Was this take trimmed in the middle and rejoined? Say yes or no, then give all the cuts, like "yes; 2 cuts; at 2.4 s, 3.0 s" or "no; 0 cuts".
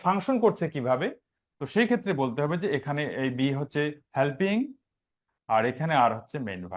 no; 0 cuts